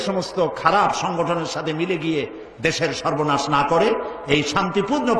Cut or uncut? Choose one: uncut